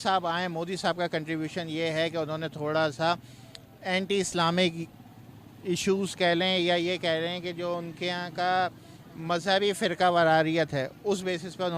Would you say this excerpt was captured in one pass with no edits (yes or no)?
no